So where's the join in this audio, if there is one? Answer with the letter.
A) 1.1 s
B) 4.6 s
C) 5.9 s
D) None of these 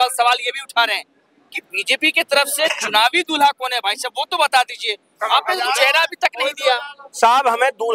D